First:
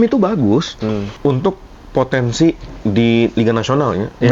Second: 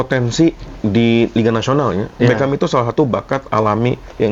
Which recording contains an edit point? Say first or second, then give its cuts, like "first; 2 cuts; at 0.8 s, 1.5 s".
first; 1 cut; at 1.1 s